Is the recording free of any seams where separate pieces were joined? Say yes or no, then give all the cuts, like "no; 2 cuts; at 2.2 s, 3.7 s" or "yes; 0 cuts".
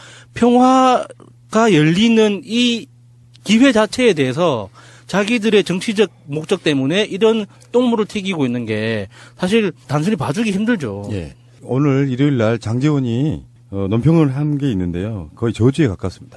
yes; 0 cuts